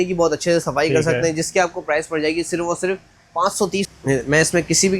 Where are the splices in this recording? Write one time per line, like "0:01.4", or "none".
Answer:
0:03.9